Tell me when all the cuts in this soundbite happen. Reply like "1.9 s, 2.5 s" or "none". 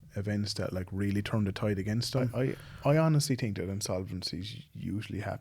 2.3 s